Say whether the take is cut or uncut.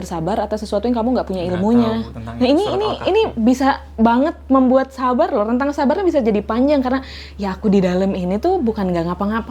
uncut